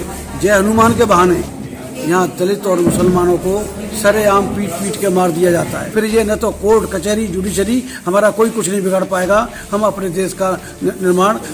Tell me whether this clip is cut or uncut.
cut